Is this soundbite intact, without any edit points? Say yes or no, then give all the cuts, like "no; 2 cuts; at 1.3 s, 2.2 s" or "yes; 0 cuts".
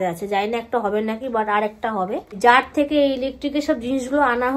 yes; 0 cuts